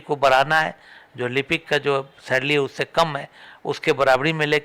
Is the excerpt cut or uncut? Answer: uncut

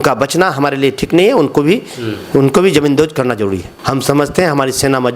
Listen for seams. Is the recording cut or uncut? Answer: cut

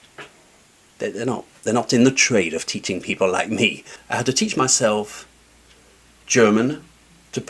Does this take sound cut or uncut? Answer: cut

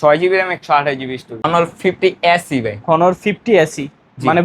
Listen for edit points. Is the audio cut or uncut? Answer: cut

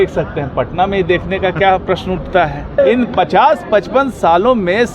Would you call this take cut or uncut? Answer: cut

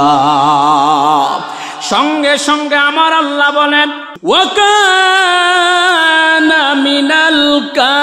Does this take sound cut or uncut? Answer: cut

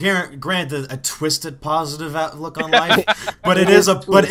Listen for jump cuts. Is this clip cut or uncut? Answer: uncut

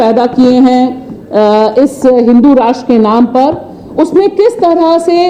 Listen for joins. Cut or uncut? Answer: uncut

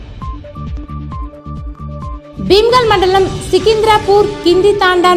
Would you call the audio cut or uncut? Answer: uncut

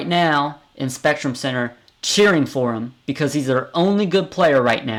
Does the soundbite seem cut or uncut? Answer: uncut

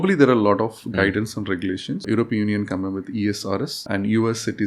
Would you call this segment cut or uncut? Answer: cut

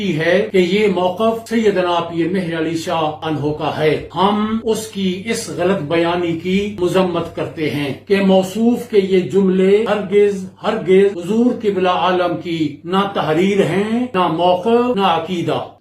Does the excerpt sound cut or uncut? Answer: uncut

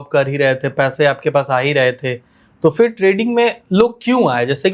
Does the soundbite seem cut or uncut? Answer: uncut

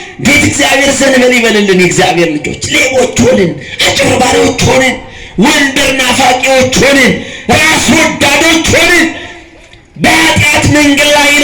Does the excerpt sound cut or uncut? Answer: uncut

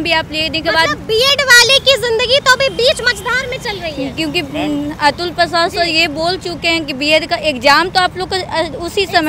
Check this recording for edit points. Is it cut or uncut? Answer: uncut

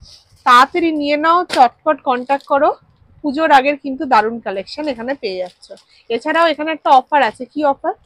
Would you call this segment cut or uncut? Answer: uncut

